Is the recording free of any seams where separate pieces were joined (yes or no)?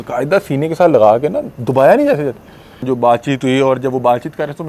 no